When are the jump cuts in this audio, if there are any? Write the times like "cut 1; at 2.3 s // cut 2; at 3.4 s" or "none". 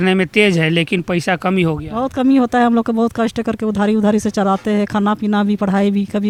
none